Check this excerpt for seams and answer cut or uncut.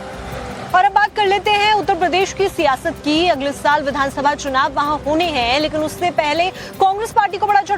uncut